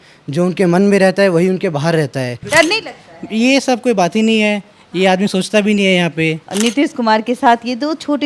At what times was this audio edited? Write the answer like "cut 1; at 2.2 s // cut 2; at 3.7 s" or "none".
cut 1; at 2.5 s // cut 2; at 6.4 s

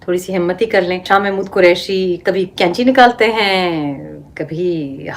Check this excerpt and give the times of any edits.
cut 1; at 1.0 s

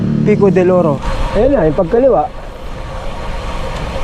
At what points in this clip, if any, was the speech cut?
cut 1; at 1.1 s

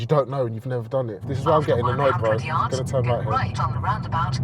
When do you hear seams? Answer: cut 1; at 1.3 s

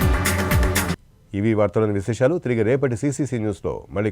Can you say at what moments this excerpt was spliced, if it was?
none

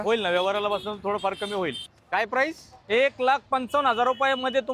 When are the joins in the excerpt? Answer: cut 1; at 1.9 s

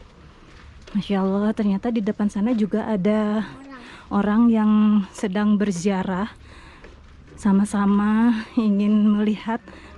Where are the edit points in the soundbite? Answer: none

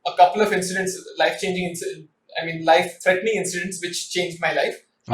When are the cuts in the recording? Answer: none

